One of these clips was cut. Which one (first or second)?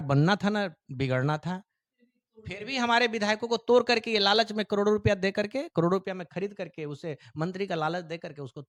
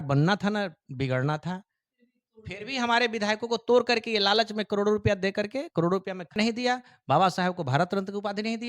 second